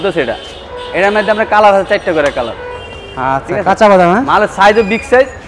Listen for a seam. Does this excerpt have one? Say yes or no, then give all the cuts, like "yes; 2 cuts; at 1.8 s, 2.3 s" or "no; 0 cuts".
no; 0 cuts